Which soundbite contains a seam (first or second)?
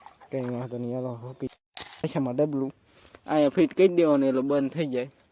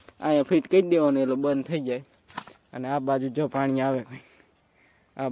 first